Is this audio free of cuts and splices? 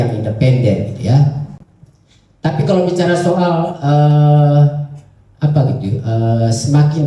yes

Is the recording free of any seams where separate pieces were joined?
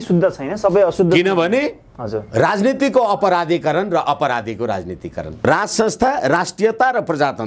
yes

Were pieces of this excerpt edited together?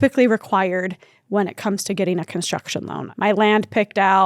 yes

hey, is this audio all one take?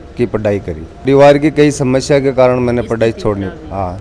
no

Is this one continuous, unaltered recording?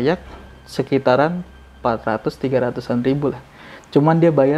yes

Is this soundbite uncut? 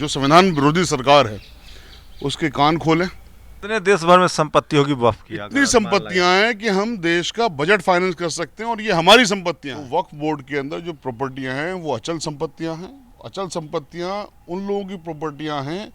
no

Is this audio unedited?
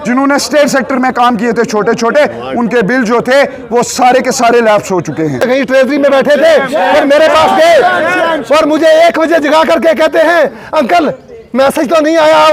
no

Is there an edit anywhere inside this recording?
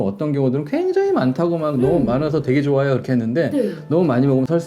no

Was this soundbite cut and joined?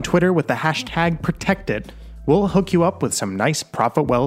no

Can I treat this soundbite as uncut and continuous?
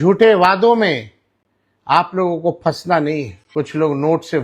no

